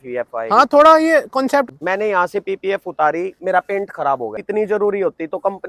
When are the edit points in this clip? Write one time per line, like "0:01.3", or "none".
0:01.7
0:04.4

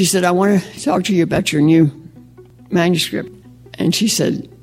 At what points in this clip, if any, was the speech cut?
0:03.4

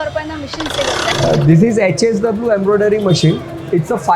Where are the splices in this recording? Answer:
0:01.0

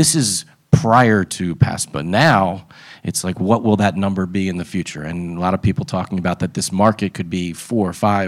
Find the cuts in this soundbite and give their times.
none

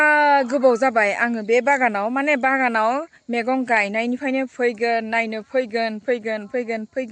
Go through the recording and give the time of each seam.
none

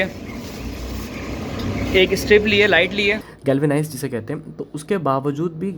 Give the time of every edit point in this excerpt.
0:03.3

